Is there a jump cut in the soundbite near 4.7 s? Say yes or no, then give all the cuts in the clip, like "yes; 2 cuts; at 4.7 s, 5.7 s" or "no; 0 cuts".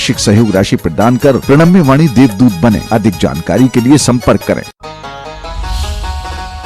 yes; 1 cut; at 4.7 s